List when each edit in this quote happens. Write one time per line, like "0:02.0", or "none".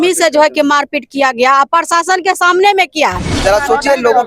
0:03.3